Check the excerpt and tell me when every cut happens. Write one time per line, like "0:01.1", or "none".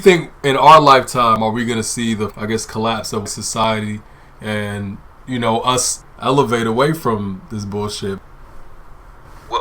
0:02.3
0:03.6
0:05.9